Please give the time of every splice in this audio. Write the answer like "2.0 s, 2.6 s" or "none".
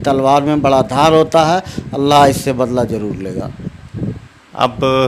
none

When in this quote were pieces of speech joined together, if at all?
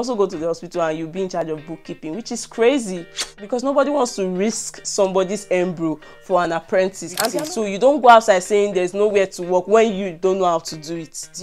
3.2 s, 7.2 s

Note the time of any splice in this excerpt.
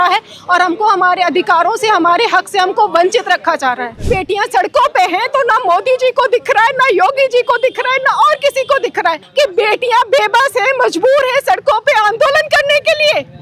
4.0 s, 9.2 s

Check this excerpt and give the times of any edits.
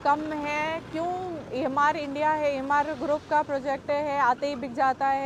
none

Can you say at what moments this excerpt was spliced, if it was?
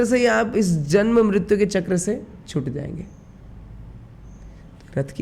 none

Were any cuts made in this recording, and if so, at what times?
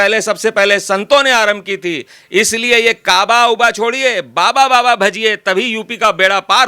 none

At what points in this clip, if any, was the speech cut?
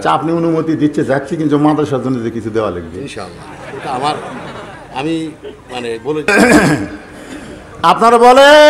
6.3 s

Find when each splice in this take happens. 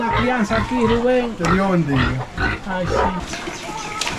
3.2 s

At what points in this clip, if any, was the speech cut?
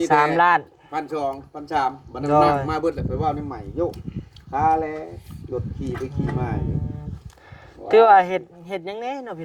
none

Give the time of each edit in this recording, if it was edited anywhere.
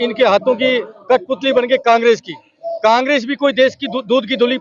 none

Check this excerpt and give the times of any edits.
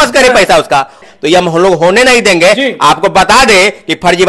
1.1 s

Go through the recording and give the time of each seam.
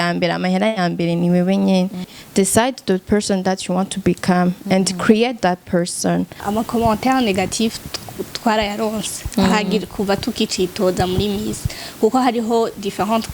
2.2 s, 6.4 s

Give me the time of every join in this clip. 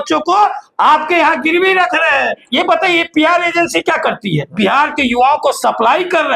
2.4 s, 4.5 s

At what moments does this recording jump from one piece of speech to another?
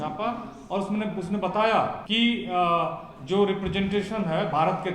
2.0 s

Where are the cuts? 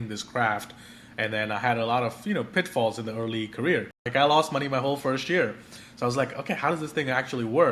4.0 s

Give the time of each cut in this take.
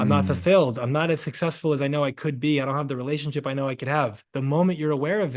4.2 s

